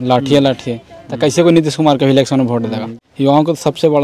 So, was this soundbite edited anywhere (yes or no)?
yes